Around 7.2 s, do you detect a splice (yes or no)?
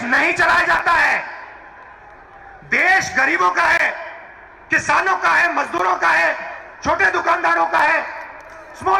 no